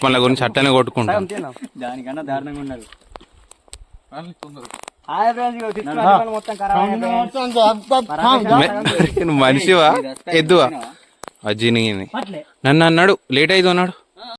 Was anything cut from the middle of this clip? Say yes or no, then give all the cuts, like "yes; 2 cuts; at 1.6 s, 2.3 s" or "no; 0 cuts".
no; 0 cuts